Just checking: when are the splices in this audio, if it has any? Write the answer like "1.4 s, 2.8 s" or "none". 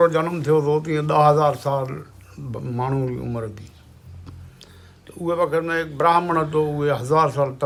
none

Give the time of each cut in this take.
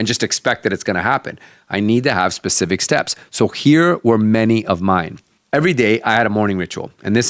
none

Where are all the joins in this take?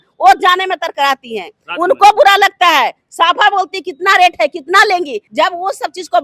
5.2 s

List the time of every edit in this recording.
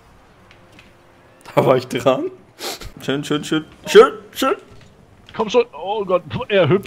2.9 s

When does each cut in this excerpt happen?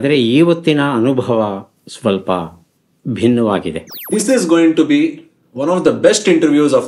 4.0 s

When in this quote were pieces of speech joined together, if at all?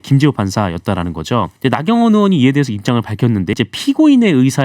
1.5 s, 3.5 s

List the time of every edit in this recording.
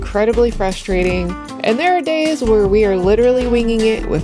1.4 s

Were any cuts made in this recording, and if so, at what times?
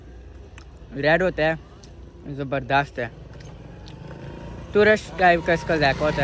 none

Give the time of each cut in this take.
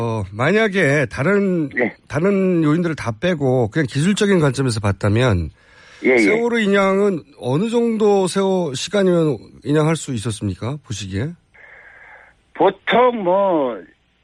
none

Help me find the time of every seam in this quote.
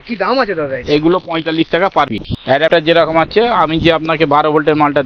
2.3 s

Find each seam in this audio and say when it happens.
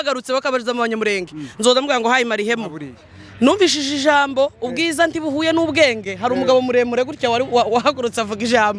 2.9 s

